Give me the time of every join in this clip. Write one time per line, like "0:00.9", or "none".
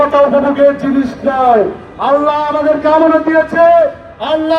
none